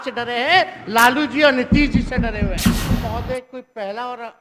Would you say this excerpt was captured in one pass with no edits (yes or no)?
no